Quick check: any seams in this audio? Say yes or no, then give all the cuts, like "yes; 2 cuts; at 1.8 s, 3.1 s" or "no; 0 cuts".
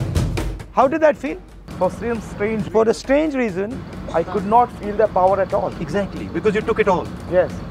no; 0 cuts